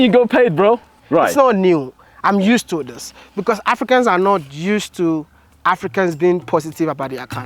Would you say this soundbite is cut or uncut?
cut